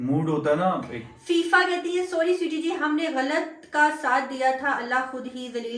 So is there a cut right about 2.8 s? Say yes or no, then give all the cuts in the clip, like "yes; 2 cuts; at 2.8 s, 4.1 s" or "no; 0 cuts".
no; 0 cuts